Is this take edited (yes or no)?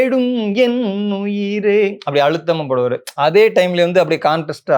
no